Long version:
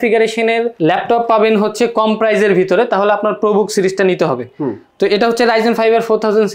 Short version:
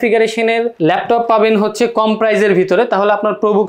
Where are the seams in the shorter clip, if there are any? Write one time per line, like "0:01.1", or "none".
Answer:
none